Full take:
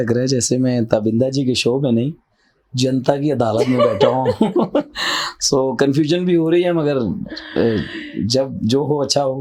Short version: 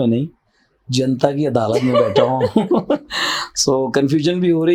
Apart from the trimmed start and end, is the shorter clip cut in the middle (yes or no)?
no